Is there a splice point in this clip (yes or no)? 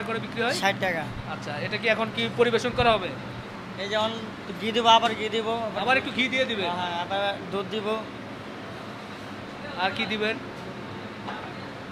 no